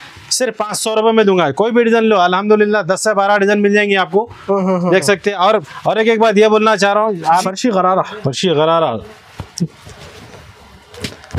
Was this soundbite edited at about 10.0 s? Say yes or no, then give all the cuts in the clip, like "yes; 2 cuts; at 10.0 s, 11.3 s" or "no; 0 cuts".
no; 1 cut; at 7.4 s